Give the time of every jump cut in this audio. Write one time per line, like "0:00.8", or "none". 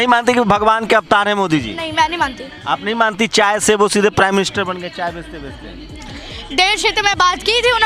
0:06.2